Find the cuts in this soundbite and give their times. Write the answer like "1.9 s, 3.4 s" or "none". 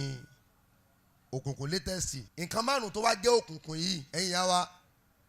2.2 s